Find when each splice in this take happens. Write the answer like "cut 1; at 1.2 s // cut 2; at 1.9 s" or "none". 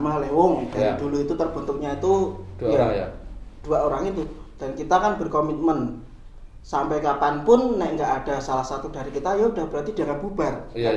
none